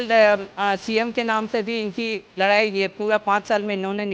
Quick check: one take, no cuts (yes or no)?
yes